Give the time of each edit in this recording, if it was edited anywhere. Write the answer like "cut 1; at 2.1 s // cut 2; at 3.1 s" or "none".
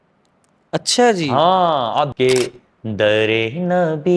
cut 1; at 2.1 s